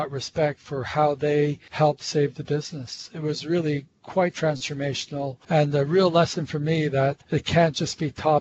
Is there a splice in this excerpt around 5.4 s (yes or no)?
yes